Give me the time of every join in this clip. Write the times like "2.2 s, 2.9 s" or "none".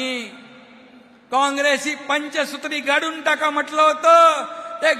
none